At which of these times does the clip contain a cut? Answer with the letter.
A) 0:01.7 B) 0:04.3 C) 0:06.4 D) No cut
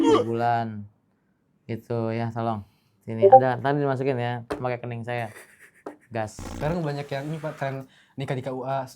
C